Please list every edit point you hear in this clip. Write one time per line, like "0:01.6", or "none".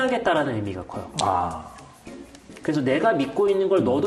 none